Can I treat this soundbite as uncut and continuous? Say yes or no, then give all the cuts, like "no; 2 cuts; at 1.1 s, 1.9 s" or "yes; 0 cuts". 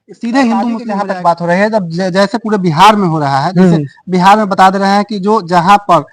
no; 1 cut; at 1.0 s